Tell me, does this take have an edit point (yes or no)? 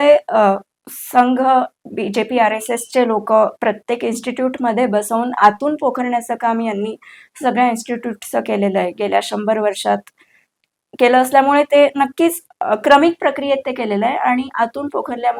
no